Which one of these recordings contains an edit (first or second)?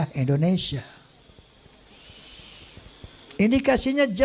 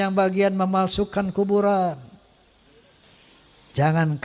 second